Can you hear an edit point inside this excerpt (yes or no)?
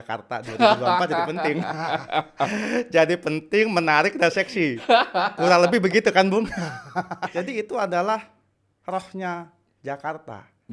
yes